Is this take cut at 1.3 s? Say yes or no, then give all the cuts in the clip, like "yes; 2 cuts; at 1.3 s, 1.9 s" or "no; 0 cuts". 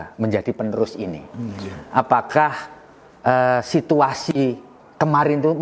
no; 0 cuts